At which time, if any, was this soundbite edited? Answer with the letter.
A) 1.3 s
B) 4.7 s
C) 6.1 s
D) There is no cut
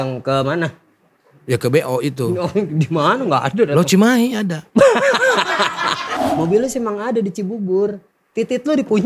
C